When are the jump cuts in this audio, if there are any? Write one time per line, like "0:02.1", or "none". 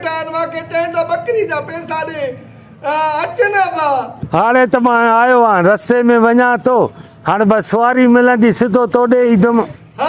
none